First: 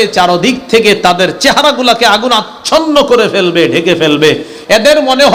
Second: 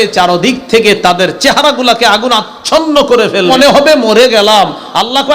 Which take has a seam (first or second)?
second